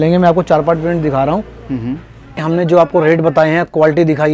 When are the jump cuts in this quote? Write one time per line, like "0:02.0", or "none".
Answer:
0:02.4